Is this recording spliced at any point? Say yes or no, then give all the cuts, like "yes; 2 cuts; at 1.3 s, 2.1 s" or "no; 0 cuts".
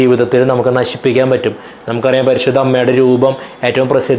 no; 0 cuts